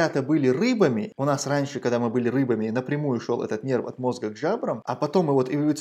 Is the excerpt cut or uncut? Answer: cut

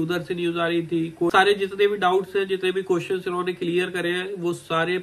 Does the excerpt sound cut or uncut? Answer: cut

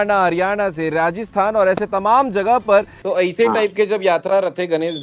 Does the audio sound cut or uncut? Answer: cut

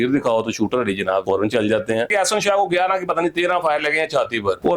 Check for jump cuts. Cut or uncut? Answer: cut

